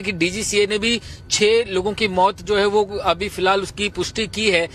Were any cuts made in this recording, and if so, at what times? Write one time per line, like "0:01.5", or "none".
none